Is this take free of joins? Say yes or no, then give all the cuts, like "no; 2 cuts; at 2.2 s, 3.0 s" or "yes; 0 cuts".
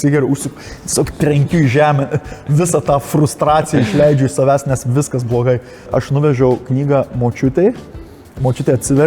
no; 1 cut; at 5.9 s